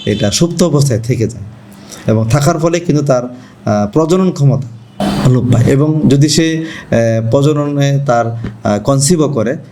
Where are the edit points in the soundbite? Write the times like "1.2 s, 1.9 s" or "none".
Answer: 4.9 s